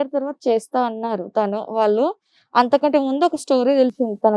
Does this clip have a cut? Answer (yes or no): no